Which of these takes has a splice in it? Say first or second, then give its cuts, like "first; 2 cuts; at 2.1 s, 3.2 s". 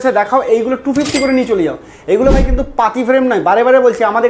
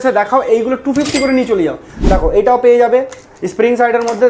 second; 1 cut; at 1.9 s